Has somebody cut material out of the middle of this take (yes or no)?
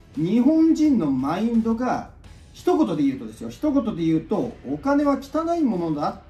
no